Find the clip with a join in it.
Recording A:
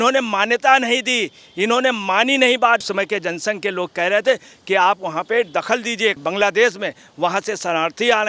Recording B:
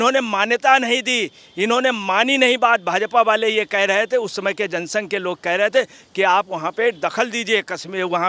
A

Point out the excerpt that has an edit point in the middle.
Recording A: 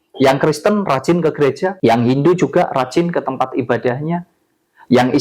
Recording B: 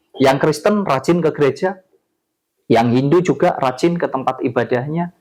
A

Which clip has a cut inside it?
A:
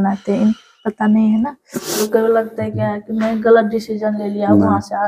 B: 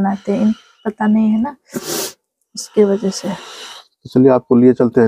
A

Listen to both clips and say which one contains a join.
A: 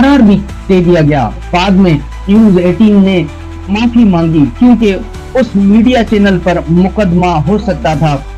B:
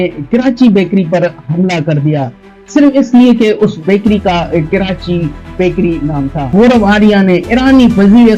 B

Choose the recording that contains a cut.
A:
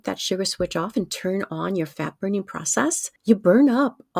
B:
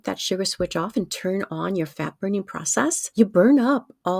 B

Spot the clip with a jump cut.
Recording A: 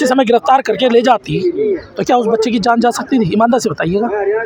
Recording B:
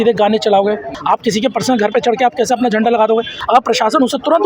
B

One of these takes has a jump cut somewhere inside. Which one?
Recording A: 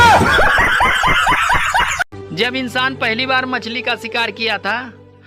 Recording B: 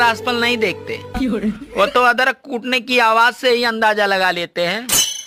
A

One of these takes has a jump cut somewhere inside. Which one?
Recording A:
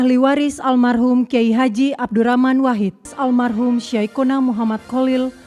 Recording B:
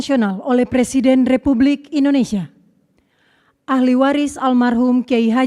A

